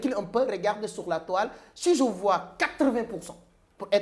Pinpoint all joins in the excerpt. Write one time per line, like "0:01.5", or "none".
none